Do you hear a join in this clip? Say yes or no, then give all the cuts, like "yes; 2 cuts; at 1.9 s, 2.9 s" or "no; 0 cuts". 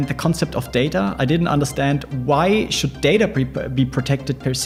no; 0 cuts